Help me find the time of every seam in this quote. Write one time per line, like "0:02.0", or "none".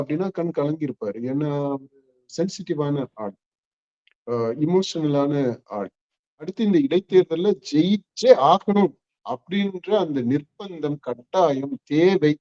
0:06.5